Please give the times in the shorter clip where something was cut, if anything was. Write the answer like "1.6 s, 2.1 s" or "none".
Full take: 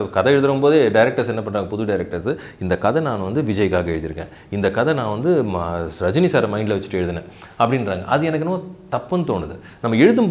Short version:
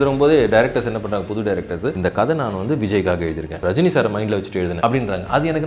2.0 s, 3.5 s, 4.8 s